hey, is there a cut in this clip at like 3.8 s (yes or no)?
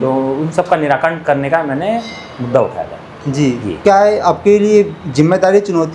yes